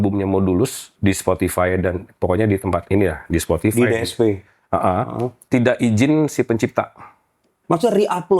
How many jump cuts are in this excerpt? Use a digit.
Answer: 3